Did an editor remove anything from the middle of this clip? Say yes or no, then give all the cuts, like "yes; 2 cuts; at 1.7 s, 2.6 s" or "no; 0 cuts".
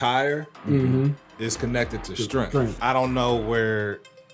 yes; 2 cuts; at 1.3 s, 2.7 s